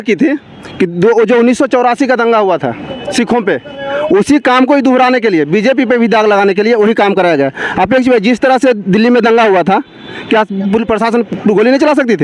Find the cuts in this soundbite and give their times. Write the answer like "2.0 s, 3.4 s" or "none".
none